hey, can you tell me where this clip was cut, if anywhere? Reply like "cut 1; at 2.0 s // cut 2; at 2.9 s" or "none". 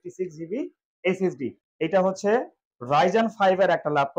cut 1; at 1.5 s